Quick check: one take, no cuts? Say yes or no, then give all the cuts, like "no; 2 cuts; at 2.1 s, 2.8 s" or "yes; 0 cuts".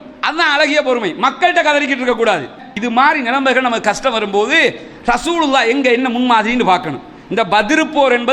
yes; 0 cuts